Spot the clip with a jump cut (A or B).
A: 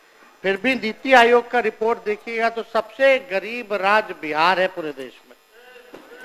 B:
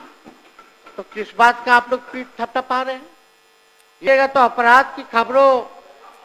B